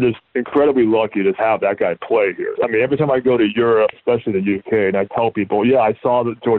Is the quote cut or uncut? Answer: cut